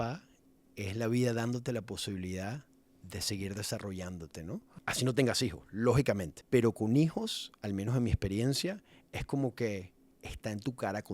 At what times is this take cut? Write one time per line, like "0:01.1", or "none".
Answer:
0:04.7
0:06.3